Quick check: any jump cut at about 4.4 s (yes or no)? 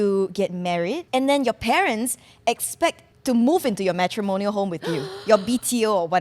no